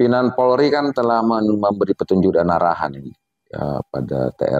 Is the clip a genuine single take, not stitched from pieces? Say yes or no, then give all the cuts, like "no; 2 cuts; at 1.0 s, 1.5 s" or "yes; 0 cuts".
yes; 0 cuts